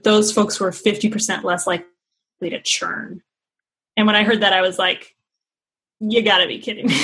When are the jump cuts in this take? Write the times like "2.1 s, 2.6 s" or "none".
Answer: none